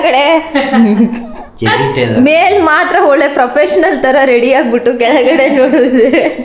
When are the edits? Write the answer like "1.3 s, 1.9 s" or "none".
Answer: 2.4 s